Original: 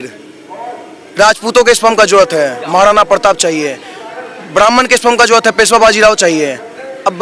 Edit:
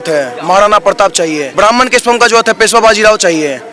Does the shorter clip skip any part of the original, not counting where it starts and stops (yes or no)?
yes